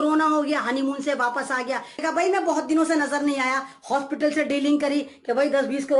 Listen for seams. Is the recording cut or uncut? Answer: cut